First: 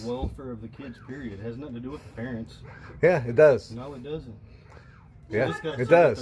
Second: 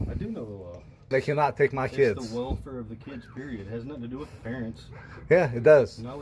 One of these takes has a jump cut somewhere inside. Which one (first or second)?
second